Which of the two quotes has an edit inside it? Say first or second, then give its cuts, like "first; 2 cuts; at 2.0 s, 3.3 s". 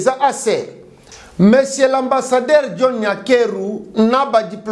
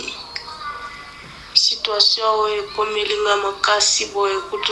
first; 1 cut; at 1.1 s